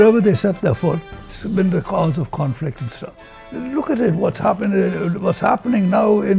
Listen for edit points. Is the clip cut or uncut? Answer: uncut